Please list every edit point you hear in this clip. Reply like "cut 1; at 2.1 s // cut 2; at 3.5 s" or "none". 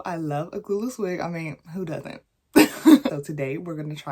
cut 1; at 3.1 s